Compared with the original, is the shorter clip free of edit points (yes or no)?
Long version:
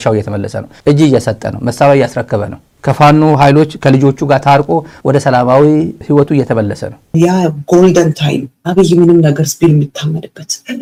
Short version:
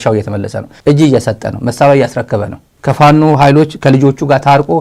yes